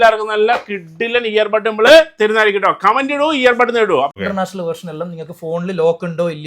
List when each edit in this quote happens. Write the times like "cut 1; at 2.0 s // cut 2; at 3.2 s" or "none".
cut 1; at 4.2 s